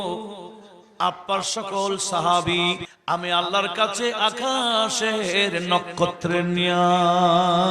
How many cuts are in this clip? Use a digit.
1